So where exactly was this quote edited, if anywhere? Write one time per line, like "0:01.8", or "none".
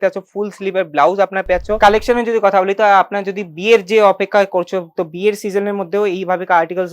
0:01.8